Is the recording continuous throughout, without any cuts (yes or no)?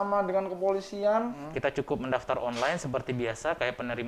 no